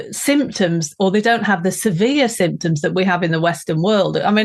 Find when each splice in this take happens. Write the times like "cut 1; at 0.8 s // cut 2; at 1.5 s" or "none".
none